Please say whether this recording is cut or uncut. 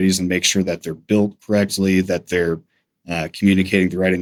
uncut